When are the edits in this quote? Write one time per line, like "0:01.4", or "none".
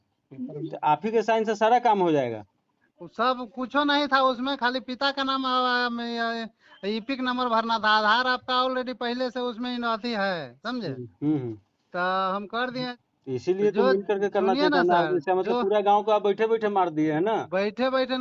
0:12.9